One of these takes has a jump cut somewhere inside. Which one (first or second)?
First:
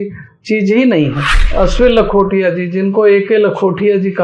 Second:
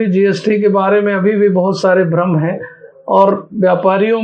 first